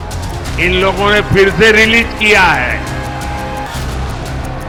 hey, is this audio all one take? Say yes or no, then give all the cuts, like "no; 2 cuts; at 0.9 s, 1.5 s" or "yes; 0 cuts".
yes; 0 cuts